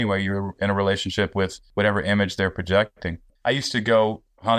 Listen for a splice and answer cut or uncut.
cut